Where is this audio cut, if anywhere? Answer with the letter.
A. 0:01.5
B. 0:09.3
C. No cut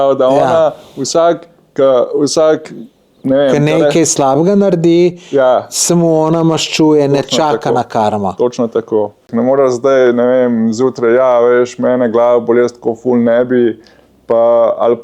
B